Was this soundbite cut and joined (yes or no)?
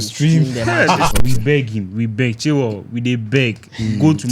yes